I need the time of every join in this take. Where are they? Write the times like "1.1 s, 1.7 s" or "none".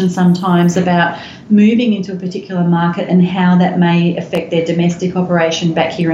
none